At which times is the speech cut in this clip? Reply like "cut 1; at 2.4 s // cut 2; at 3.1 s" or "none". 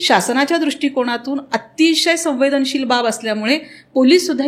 none

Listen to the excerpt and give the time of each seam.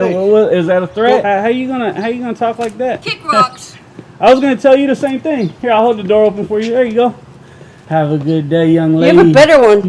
cut 1; at 1.2 s

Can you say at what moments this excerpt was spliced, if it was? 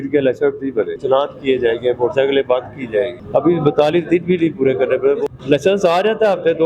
cut 1; at 1.0 s // cut 2; at 3.2 s // cut 3; at 5.3 s

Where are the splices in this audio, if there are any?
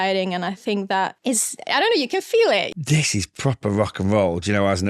cut 1; at 1.2 s // cut 2; at 2.7 s

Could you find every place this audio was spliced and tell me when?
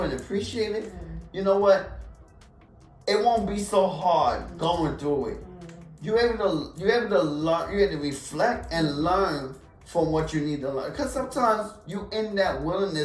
none

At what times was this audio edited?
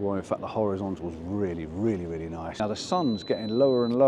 cut 1; at 2.5 s

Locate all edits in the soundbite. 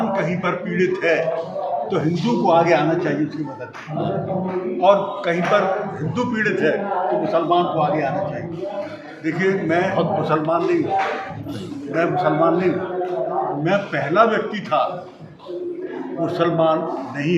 none

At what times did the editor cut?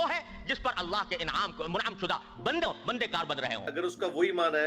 cut 1; at 3.7 s

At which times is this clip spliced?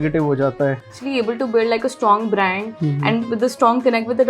cut 1; at 1.0 s

